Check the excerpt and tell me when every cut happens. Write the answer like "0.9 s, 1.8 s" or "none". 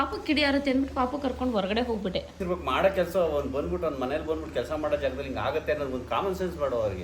2.4 s